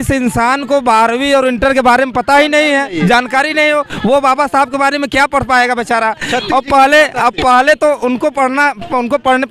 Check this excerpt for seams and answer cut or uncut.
uncut